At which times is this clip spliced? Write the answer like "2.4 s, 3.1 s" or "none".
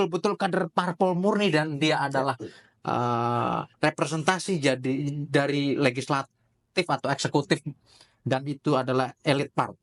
none